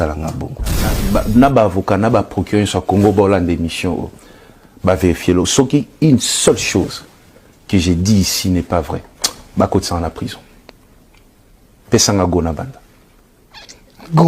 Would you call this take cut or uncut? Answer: cut